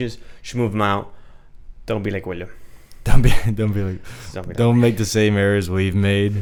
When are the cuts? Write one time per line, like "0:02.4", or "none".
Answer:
none